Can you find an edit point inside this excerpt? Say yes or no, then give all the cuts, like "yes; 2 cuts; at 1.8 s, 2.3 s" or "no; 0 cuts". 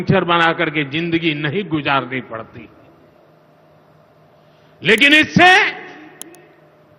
no; 0 cuts